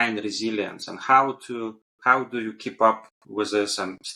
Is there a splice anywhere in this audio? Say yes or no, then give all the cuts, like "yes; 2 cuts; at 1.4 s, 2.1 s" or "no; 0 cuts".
no; 0 cuts